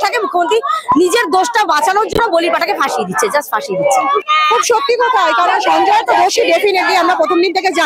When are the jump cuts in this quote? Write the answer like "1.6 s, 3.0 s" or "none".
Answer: 4.3 s